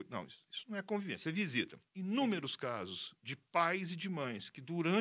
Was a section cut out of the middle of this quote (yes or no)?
yes